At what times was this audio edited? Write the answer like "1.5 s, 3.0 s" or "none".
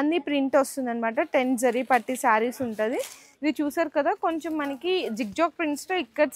3.3 s